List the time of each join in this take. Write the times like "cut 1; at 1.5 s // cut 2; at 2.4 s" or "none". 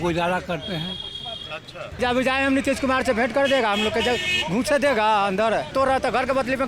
cut 1; at 2.0 s // cut 2; at 5.7 s